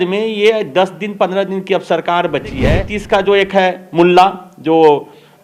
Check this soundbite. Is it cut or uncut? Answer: cut